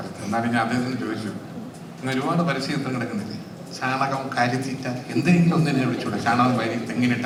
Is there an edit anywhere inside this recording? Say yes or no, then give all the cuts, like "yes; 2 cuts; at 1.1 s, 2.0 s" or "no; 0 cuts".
no; 0 cuts